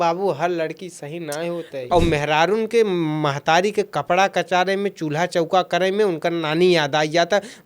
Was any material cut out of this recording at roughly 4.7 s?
no; 1 cut; at 1.8 s

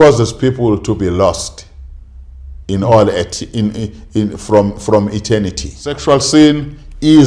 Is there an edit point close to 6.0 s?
yes; 1 cut; at 6.0 s

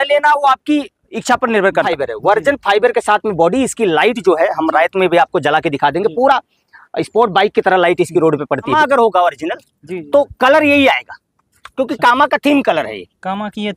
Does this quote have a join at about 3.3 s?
no; 2 cuts; at 1.9 s, 8.8 s

